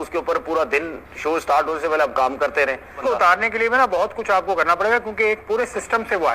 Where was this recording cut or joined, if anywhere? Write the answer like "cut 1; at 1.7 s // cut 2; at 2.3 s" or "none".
cut 1; at 3.0 s